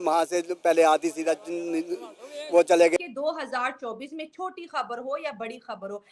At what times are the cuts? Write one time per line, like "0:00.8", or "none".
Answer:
0:03.0